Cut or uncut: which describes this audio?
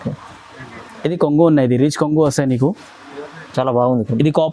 uncut